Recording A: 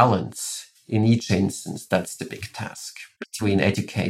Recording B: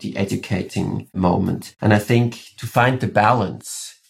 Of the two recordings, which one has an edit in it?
B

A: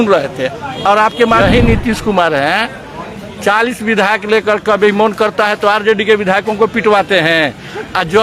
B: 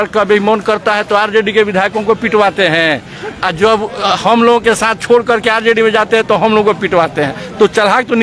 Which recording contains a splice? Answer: A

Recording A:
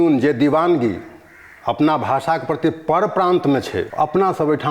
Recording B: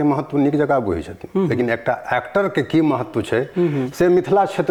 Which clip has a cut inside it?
A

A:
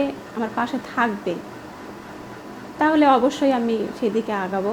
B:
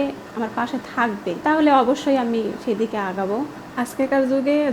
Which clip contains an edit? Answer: B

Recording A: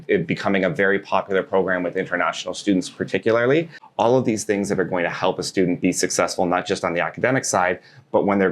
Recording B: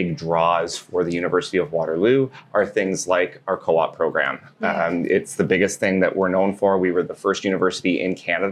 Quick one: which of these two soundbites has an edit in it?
A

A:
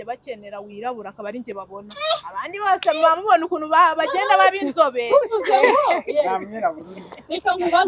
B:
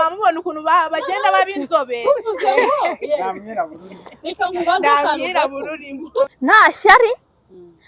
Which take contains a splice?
B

